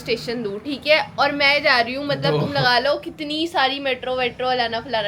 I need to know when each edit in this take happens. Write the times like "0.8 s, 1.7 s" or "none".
none